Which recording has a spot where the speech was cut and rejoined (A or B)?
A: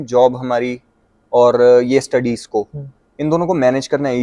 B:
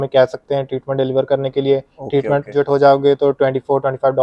B